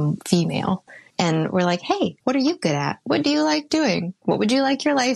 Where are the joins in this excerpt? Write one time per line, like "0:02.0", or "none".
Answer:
0:00.9
0:02.2
0:04.1

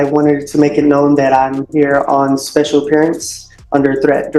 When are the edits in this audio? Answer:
none

